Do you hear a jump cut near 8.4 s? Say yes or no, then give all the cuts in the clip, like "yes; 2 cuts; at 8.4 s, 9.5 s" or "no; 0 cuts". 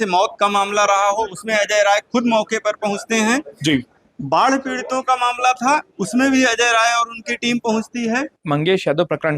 yes; 1 cut; at 8.4 s